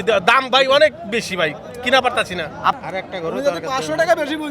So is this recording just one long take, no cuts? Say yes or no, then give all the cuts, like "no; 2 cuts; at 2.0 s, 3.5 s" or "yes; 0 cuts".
no; 1 cut; at 2.8 s